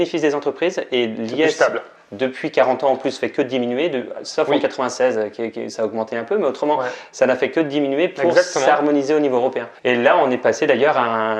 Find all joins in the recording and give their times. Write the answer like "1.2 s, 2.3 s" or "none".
none